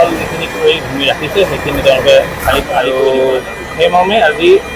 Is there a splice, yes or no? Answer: yes